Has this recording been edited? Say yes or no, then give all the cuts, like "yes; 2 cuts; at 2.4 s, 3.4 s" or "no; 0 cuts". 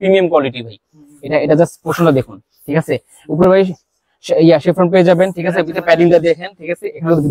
no; 0 cuts